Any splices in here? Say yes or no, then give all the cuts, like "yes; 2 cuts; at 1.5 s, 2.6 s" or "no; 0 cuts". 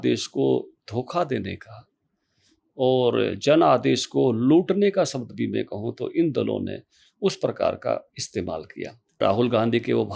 yes; 1 cut; at 9.2 s